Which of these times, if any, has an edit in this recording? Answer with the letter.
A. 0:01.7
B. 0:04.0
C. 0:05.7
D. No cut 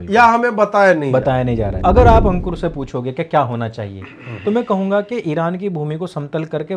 A